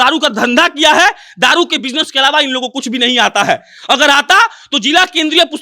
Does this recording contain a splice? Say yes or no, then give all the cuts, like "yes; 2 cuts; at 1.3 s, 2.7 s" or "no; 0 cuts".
no; 0 cuts